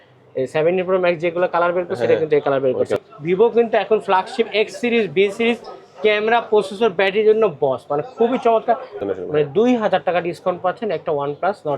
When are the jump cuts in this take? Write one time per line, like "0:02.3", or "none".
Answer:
0:03.0
0:09.0